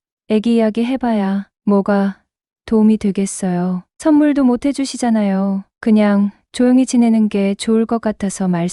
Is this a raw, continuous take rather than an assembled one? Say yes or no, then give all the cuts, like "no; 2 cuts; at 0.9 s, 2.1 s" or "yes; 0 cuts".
yes; 0 cuts